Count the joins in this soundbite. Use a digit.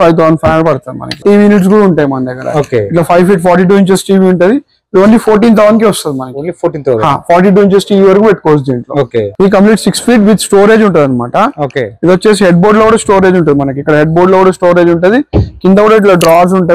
2